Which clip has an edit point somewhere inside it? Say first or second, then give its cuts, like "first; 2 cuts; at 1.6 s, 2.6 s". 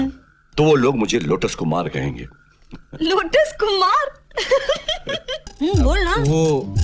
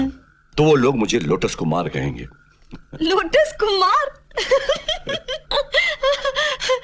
first; 1 cut; at 5.3 s